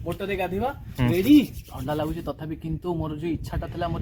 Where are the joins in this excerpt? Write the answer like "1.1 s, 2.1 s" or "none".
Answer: none

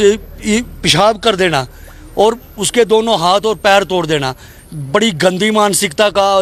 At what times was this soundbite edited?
none

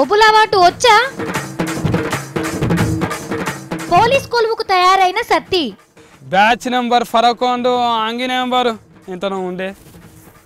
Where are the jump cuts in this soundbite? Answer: 2.0 s

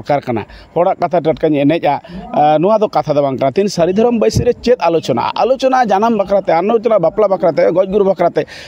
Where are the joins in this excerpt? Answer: none

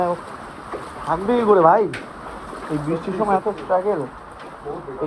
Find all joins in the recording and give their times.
none

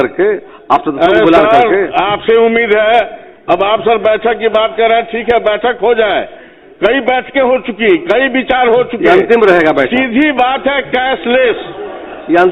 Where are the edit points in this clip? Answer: none

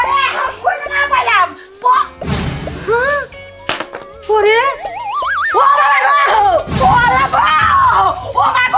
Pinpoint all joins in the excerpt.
5.4 s

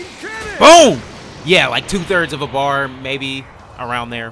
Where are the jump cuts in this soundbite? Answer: none

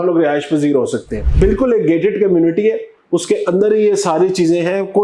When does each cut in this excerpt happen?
1.2 s

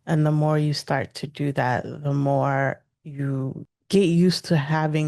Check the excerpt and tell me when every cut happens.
3.7 s

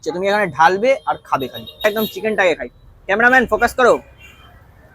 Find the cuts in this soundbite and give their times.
1.8 s

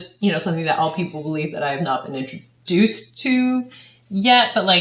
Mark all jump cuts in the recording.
none

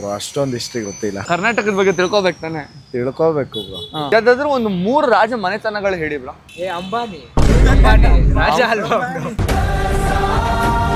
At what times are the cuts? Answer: none

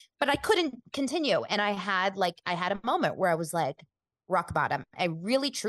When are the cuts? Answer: none

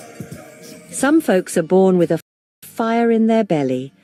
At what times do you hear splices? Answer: none

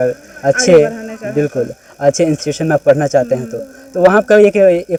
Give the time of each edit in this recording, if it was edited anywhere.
none

